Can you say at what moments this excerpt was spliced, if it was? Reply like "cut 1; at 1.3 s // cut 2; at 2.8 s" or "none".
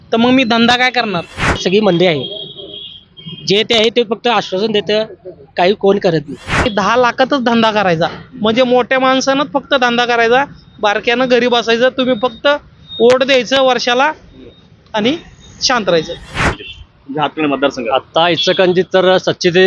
cut 1; at 1.6 s // cut 2; at 6.7 s // cut 3; at 16.5 s